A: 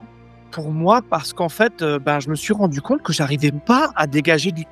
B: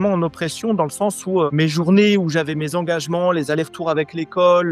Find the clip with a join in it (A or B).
B